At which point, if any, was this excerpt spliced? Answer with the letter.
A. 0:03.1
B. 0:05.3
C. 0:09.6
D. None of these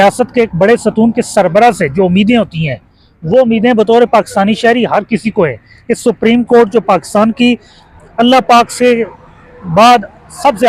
D